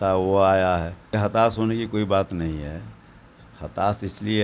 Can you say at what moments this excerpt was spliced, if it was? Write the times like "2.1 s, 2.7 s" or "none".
1.1 s